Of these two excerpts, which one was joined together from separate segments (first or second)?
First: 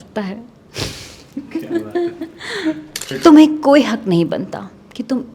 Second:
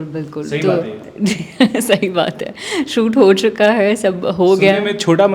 first